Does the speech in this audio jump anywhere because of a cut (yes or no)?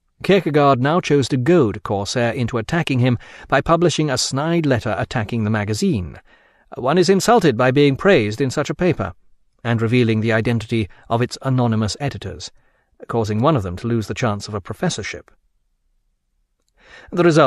yes